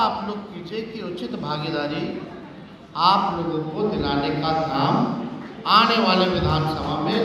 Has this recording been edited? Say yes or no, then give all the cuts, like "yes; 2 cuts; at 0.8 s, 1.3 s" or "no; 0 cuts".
no; 0 cuts